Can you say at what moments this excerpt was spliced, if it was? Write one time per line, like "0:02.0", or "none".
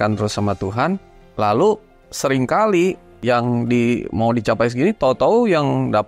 0:01.2
0:03.2